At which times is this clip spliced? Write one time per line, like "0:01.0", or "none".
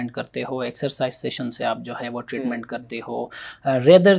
none